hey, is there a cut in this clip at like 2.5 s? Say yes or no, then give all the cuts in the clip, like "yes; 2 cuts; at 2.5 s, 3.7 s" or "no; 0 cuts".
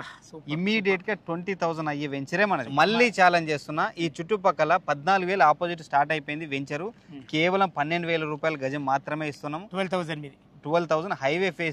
yes; 1 cut; at 2.5 s